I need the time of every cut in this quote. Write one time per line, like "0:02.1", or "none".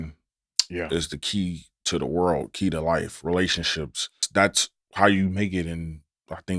0:04.2